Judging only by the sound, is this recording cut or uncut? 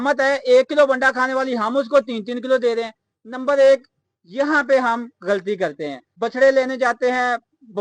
cut